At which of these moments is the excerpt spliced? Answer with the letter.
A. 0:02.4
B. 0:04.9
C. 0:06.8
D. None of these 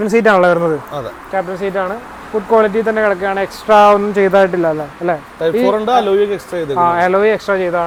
D